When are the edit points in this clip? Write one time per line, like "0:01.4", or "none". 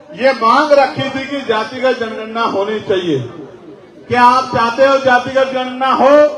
none